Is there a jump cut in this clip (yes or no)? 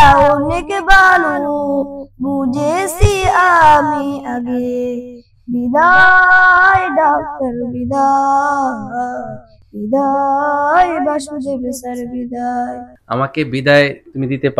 yes